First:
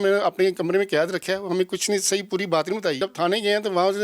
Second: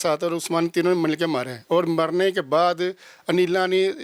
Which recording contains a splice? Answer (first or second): first